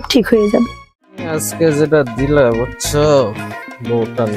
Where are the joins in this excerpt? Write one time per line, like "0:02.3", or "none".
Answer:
0:01.4